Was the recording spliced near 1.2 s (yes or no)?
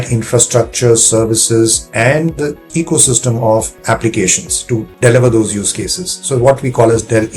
no